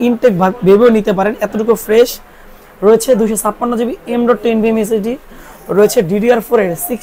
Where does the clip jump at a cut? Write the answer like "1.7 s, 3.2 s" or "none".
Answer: none